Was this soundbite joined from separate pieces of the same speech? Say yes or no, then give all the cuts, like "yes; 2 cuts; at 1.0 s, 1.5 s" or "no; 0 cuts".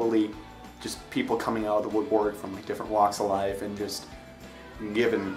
no; 0 cuts